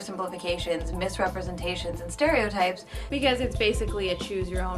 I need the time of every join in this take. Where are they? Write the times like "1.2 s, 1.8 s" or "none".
3.0 s